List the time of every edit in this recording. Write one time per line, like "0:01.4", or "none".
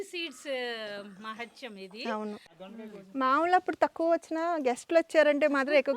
0:02.6